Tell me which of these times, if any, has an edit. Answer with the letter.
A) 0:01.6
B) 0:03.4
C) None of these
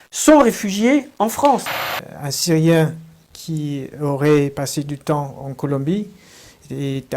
A